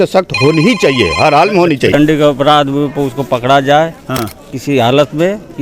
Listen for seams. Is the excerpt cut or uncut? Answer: cut